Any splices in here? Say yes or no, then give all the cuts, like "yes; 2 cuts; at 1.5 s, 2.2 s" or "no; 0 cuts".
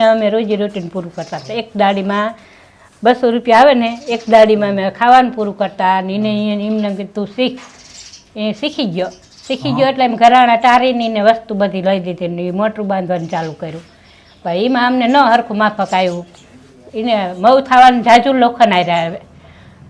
no; 0 cuts